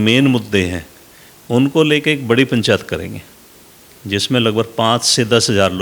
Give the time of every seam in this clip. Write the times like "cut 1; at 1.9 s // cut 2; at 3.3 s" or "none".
none